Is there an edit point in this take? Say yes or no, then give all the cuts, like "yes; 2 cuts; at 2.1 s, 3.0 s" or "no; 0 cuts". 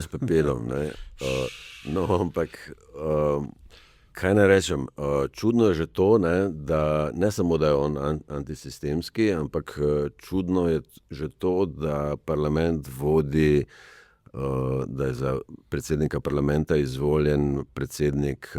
no; 0 cuts